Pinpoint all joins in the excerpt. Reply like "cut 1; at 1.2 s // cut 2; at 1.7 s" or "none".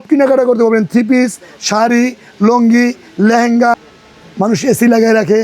cut 1; at 3.9 s